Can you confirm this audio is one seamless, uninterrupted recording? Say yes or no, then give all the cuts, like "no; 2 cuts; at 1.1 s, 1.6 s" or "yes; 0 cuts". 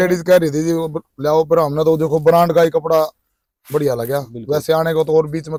yes; 0 cuts